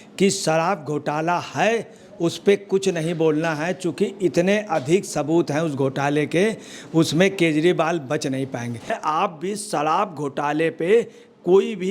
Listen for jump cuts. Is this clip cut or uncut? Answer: cut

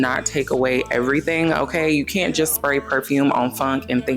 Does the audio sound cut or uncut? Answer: uncut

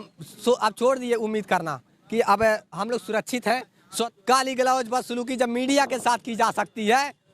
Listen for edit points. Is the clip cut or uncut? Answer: cut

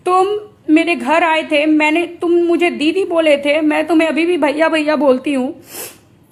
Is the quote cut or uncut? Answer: uncut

